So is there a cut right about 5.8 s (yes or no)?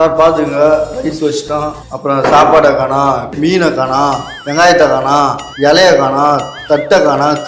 no